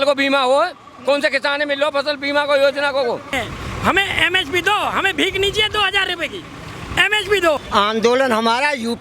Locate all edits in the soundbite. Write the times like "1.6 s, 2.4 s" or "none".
3.3 s, 7.6 s